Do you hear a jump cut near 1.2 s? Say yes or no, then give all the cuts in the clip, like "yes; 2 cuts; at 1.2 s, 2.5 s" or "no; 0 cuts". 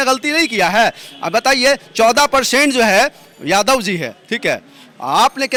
no; 0 cuts